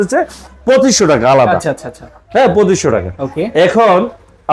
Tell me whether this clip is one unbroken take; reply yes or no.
yes